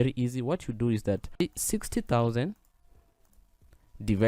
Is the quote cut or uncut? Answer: cut